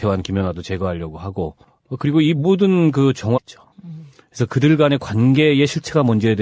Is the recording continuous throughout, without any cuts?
yes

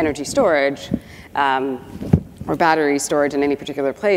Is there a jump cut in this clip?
no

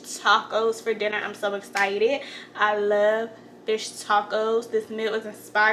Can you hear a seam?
no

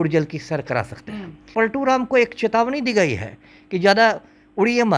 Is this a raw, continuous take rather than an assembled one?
no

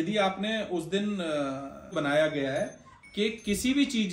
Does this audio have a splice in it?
yes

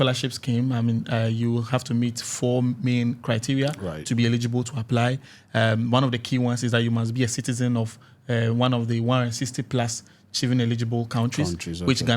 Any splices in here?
no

